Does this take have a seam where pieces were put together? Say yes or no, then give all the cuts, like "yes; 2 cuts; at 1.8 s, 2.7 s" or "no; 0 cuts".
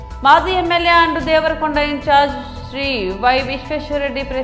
no; 0 cuts